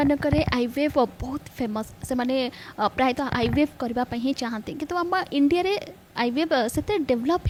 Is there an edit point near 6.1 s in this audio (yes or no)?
no